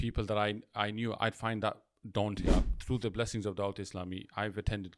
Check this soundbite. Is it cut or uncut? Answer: cut